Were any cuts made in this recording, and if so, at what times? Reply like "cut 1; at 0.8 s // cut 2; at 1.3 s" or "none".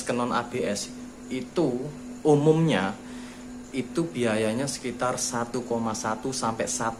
none

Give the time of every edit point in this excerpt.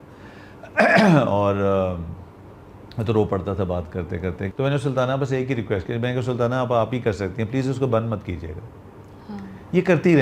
cut 1; at 4.4 s

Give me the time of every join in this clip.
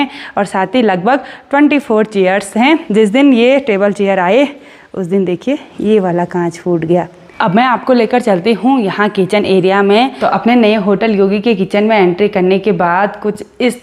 cut 1; at 2.8 s // cut 2; at 7.4 s // cut 3; at 10.2 s

